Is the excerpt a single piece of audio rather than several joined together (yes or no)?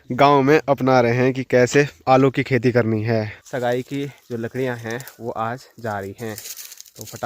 no